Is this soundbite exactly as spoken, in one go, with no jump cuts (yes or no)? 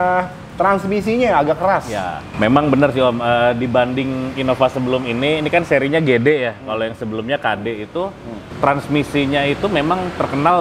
no